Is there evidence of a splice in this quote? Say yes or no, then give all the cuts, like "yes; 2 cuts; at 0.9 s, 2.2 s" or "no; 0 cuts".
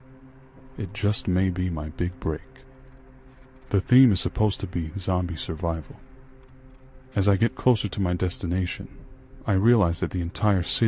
no; 0 cuts